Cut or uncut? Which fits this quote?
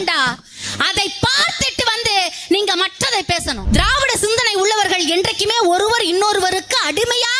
cut